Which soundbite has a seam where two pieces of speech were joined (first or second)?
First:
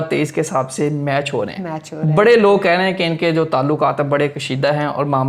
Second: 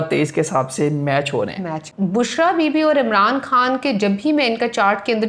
second